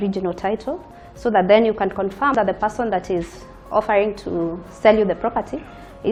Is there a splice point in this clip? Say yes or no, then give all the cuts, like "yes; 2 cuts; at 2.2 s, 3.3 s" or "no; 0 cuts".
no; 0 cuts